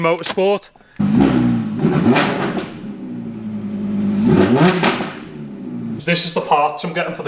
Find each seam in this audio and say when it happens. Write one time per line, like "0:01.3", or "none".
0:01.0
0:05.9